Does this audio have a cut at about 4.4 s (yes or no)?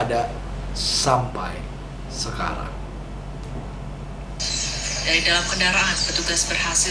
yes